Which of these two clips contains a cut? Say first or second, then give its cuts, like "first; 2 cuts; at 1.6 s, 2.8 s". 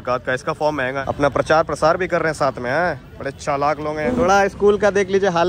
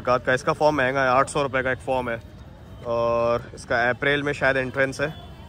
first; 2 cuts; at 1.0 s, 4.1 s